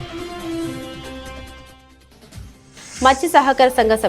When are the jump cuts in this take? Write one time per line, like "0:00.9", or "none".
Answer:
0:02.5